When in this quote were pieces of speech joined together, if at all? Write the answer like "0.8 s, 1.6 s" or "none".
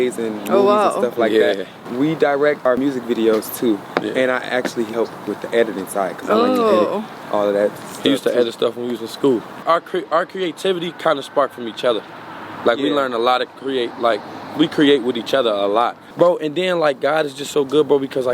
1.8 s, 2.7 s, 4.9 s, 9.6 s, 16.0 s